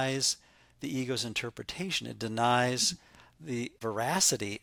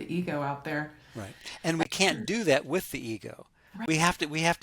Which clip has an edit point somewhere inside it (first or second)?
second